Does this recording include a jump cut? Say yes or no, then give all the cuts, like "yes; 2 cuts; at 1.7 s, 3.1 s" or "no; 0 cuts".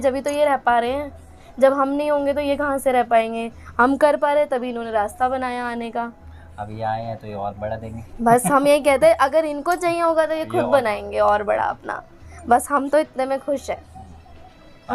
no; 0 cuts